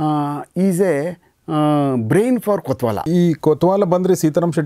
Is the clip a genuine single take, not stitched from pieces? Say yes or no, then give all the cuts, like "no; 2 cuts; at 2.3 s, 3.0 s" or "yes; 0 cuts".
no; 1 cut; at 3.1 s